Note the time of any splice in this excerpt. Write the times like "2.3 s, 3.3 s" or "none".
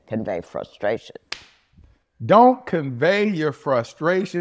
none